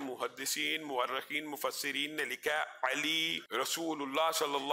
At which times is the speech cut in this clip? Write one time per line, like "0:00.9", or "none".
0:03.4